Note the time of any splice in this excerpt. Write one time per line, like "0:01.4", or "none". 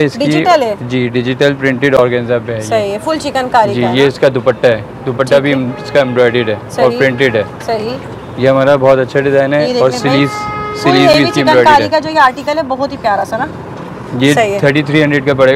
none